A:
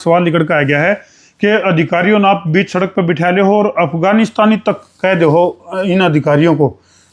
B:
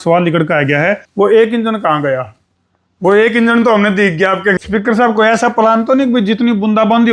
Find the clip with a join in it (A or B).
B